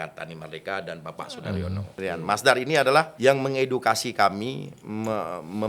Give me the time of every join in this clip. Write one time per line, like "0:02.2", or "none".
0:02.0
0:03.1